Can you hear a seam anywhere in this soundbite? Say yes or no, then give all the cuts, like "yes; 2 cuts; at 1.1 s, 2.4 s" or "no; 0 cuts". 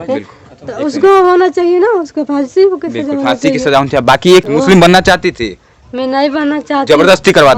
yes; 1 cut; at 4.5 s